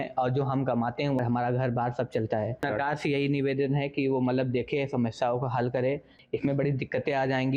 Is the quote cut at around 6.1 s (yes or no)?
yes